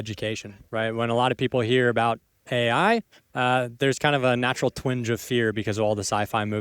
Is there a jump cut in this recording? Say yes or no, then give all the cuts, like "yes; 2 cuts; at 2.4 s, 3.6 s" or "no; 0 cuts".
no; 0 cuts